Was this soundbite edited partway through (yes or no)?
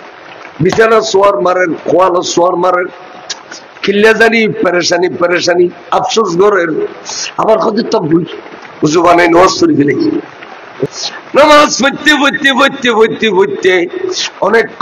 yes